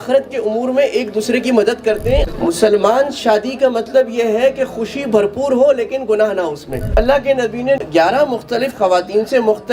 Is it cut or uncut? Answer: cut